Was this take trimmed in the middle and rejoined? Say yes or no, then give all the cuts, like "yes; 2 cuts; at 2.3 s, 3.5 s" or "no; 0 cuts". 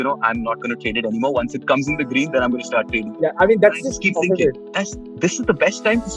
yes; 1 cut; at 4.7 s